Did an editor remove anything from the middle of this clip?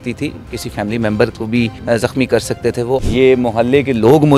yes; 2 cuts; at 1.8 s, 3.0 s

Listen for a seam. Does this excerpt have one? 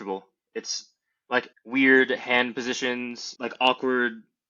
yes; 2 cuts; at 1.5 s, 3.2 s

